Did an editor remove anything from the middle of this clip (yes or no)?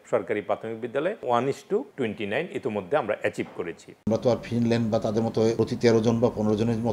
yes